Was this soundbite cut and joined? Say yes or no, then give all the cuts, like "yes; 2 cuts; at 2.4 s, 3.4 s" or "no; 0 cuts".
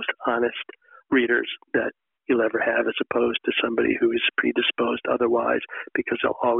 no; 0 cuts